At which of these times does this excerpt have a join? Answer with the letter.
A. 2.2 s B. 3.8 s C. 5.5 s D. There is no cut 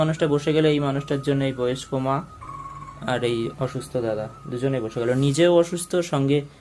D